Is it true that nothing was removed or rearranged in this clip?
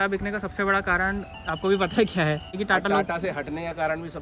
no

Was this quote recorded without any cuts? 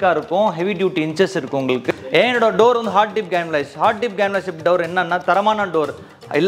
no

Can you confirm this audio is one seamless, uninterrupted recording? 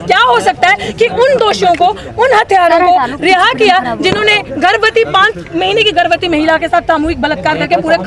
yes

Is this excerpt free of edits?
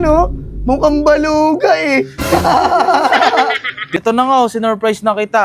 no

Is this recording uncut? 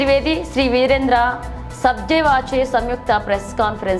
yes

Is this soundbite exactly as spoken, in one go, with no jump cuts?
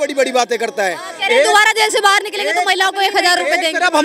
yes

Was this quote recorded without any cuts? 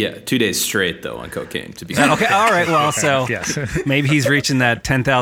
no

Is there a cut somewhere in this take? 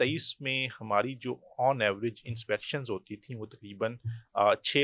no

